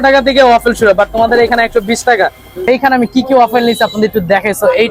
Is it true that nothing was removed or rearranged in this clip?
no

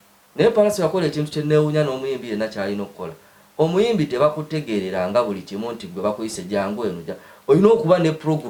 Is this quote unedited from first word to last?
yes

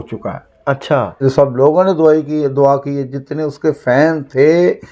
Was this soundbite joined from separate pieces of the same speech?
yes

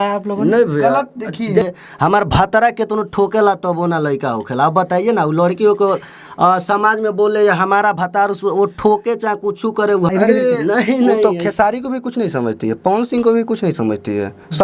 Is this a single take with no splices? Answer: no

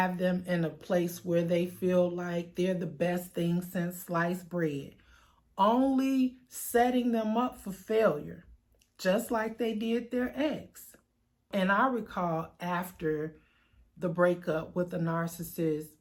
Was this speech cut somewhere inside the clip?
no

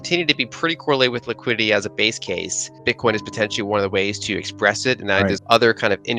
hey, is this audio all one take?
no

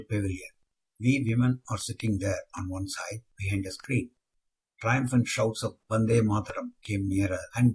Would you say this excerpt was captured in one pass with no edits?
yes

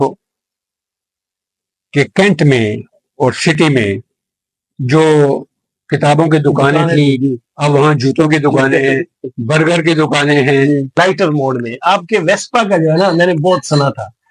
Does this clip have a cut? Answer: no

